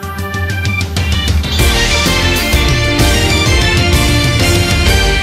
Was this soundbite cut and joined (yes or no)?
no